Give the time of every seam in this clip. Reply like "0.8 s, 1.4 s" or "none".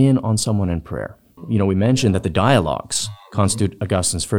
1.3 s, 3.4 s